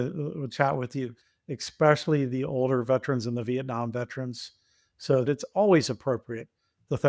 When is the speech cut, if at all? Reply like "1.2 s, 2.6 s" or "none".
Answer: 5.3 s